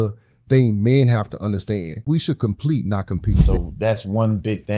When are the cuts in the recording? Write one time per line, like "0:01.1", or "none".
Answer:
0:01.9
0:03.4

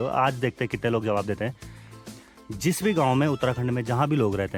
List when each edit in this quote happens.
none

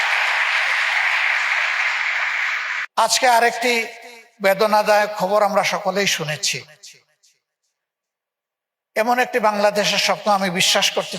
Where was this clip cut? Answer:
0:02.8

